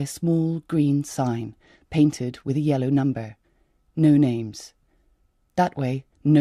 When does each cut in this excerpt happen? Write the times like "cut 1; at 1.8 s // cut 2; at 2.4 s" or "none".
none